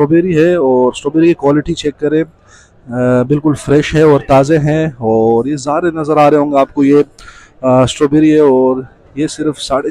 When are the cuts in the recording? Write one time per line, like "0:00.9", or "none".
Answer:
none